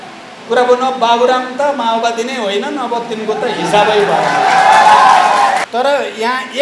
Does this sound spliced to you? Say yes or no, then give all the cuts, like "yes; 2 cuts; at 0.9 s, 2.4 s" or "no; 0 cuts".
yes; 1 cut; at 5.6 s